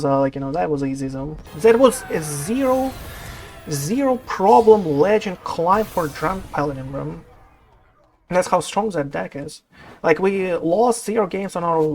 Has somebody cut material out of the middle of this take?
yes; 1 cut; at 1.4 s

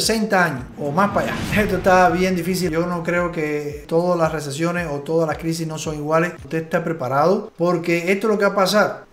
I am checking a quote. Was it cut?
yes; 2 cuts; at 1.4 s, 6.4 s

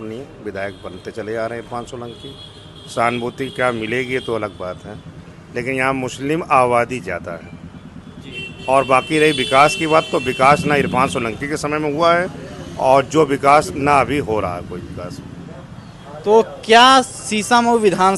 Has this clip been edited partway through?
no; 0 cuts

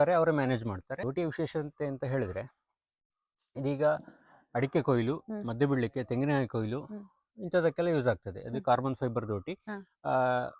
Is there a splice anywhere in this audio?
yes; 1 cut; at 0.9 s

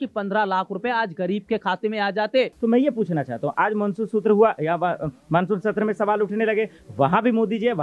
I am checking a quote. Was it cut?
yes; 1 cut; at 2.5 s

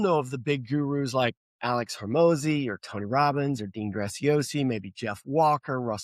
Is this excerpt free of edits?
no; 1 cut; at 1.5 s

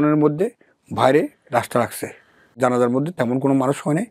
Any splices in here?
yes; 1 cut; at 2.5 s

